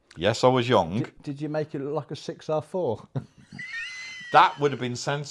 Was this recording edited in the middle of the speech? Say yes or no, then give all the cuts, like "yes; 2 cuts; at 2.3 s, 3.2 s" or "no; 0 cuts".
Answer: no; 0 cuts